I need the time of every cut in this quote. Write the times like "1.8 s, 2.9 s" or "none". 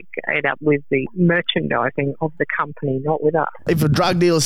1.1 s, 3.6 s